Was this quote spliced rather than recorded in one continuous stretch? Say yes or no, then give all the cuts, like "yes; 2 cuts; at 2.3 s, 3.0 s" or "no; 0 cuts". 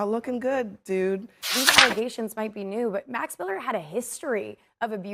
yes; 1 cut; at 1.5 s